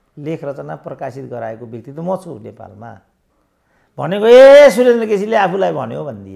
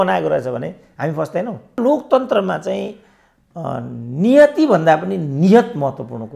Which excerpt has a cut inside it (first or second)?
second